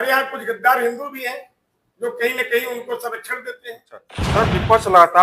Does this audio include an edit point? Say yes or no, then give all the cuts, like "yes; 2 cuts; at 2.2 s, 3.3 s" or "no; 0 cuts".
yes; 1 cut; at 4.2 s